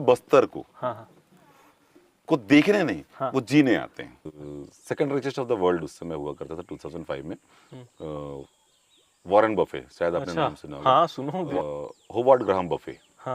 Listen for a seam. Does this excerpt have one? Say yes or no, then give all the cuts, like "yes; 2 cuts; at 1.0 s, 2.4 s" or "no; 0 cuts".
yes; 2 cuts; at 4.4 s, 11.5 s